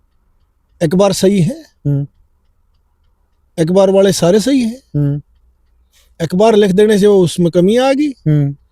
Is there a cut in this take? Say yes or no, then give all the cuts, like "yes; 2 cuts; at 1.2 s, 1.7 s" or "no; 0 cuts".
no; 0 cuts